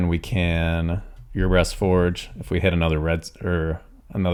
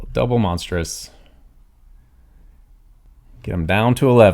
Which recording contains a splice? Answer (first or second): second